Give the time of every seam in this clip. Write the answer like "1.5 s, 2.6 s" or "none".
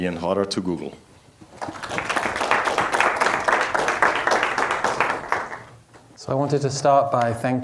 4.0 s